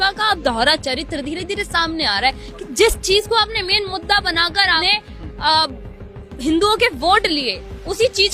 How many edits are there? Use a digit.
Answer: 1